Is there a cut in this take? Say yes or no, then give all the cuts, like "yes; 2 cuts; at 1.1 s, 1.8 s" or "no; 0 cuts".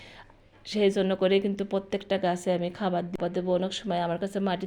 yes; 1 cut; at 3.2 s